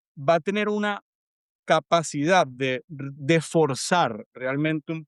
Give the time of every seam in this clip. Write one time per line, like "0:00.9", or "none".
none